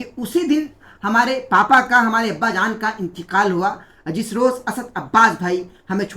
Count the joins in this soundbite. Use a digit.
0